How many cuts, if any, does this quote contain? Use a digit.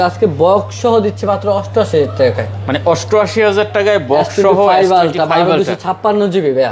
0